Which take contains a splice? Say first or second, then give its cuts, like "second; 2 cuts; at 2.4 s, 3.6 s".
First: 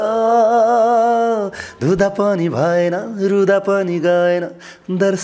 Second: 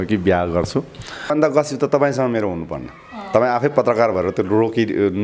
second; 1 cut; at 1.3 s